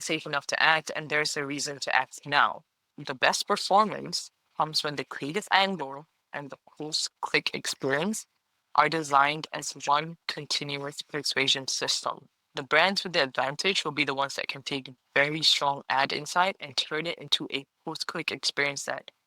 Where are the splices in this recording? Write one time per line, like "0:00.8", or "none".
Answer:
0:03.0
0:12.5

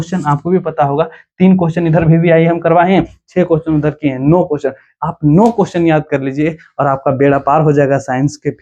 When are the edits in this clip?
none

